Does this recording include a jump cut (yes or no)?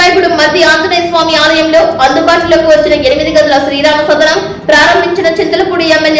no